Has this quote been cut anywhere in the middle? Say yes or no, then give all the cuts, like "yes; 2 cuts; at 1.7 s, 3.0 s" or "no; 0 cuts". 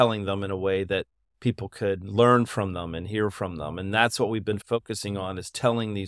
yes; 1 cut; at 4.6 s